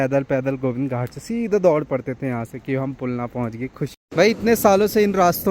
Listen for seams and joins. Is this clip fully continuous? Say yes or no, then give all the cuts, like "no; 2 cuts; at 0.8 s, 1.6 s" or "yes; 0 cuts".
no; 1 cut; at 3.9 s